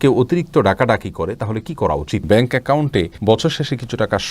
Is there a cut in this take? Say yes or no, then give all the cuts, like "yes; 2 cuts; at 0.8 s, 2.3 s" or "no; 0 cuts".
yes; 1 cut; at 2.2 s